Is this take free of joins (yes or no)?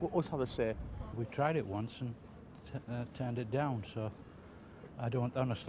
no